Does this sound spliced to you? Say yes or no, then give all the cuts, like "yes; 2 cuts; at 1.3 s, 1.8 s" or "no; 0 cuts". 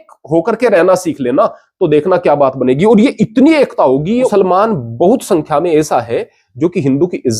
yes; 1 cut; at 4.3 s